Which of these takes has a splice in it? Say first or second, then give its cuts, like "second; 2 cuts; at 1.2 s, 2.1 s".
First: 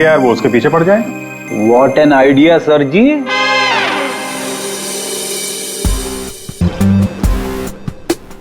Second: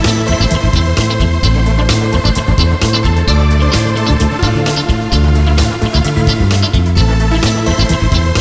first; 1 cut; at 6.6 s